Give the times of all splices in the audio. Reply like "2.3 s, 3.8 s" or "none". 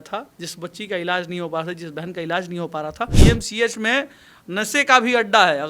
3.2 s